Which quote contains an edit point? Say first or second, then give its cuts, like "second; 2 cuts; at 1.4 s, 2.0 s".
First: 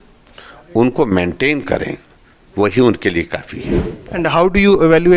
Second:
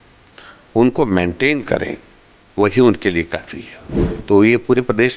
second; 1 cut; at 3.6 s